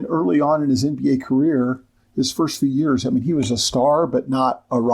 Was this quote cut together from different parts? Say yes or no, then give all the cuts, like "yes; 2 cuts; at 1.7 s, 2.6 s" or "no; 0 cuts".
no; 0 cuts